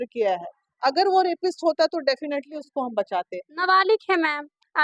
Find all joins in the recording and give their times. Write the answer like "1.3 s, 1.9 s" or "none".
none